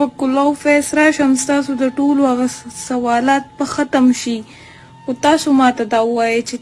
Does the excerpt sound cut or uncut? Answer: uncut